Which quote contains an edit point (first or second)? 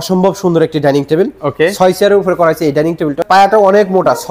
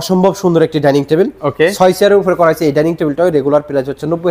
first